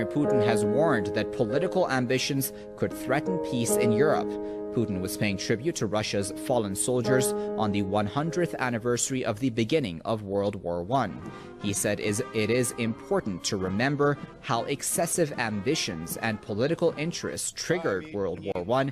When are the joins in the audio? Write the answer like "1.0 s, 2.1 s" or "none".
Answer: 13.0 s